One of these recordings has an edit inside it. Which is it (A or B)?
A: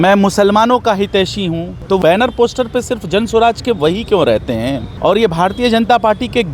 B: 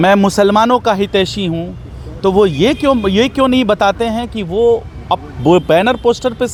A